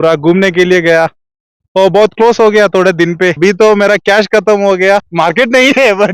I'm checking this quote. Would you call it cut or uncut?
cut